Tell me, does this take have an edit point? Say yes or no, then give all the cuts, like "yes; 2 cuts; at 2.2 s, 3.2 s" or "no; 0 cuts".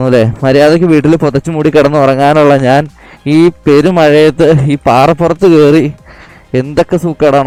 no; 0 cuts